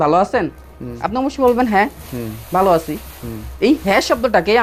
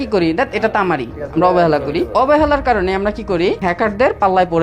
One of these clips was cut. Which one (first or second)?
second